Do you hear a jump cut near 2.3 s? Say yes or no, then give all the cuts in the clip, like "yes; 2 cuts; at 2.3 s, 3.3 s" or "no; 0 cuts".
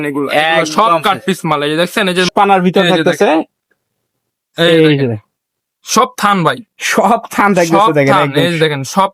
yes; 1 cut; at 2.3 s